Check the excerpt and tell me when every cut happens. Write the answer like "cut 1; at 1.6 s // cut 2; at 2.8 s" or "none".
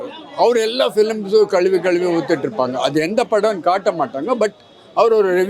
none